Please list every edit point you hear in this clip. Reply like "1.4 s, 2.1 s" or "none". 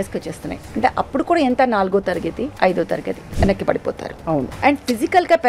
2.5 s, 3.2 s, 4.5 s